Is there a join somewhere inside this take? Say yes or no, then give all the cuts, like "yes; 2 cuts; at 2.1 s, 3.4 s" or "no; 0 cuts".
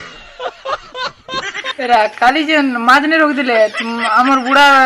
yes; 1 cut; at 1.6 s